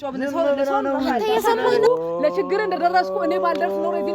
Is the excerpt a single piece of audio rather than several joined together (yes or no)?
no